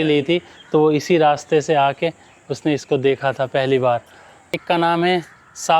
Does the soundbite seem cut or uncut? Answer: cut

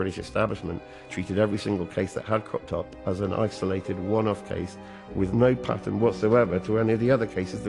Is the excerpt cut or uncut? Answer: uncut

